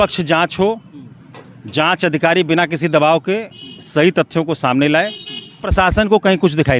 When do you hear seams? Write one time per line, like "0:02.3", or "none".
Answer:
0:05.7